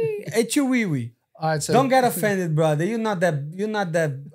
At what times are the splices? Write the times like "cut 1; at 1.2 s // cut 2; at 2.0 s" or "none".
none